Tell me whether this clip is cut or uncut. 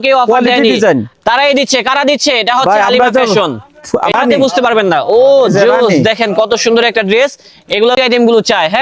cut